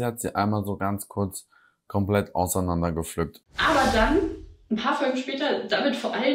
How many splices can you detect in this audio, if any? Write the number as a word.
one